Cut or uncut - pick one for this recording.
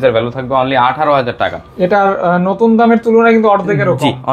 uncut